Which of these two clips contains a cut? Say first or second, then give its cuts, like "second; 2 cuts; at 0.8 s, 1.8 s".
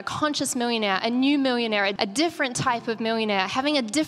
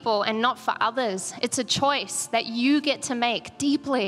first; 1 cut; at 1.9 s